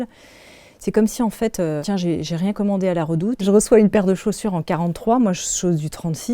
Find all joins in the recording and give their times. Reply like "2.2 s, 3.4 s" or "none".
1.8 s, 3.4 s